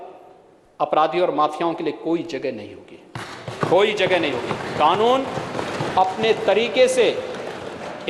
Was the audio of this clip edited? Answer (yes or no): no